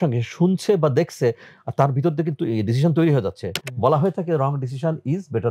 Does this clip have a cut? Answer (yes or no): no